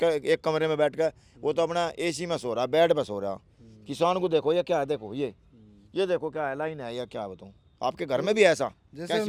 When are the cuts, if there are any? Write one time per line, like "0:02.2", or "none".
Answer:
none

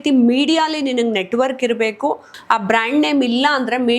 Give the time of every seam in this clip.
0:02.3

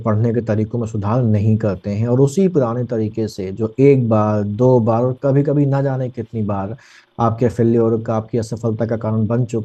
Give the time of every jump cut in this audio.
none

